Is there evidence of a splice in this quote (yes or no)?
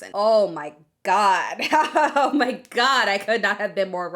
no